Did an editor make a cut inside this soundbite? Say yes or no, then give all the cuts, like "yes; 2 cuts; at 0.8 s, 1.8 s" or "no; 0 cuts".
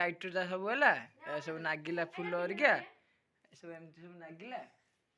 no; 0 cuts